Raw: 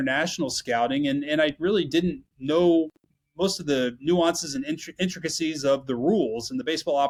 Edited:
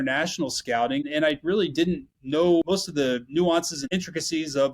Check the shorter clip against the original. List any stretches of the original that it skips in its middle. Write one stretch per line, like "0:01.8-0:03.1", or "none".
0:01.1-0:01.2
0:02.8-0:03.3
0:04.5-0:04.9